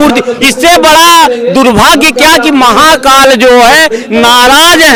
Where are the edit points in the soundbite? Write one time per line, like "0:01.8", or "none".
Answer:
none